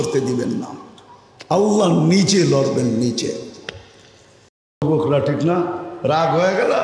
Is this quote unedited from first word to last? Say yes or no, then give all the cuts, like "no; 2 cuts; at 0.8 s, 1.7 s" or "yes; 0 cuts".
no; 1 cut; at 4.8 s